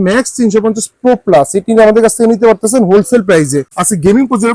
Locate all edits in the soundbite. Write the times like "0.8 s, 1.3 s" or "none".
3.6 s

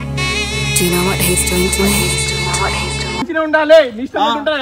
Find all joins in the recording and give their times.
3.2 s

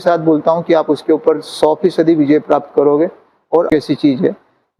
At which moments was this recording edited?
3.7 s

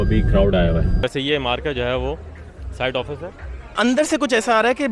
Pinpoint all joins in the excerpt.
0.9 s, 3.6 s

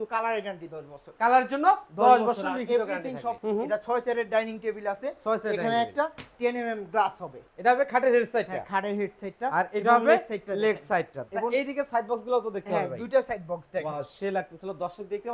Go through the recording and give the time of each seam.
3.4 s, 7.4 s, 11.2 s

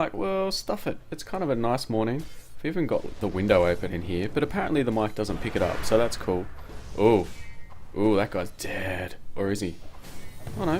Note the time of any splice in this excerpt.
6.2 s

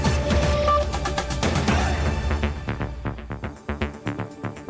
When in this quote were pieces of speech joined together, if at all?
3.5 s

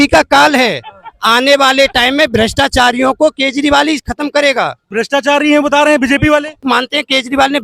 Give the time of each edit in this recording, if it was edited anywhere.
4.8 s, 6.6 s

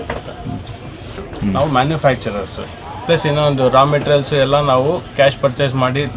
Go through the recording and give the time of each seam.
1.2 s

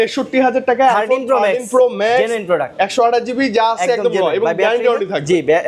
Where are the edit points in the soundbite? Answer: none

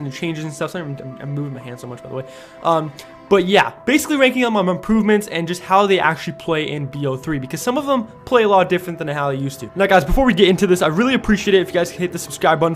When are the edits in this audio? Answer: 2.0 s

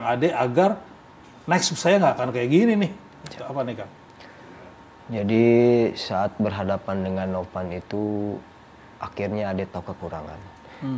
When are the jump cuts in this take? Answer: none

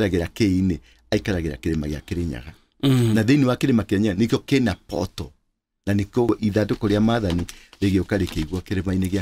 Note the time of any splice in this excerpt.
6.3 s

